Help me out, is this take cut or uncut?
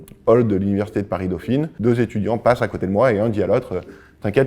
cut